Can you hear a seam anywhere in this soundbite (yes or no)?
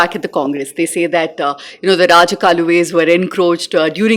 no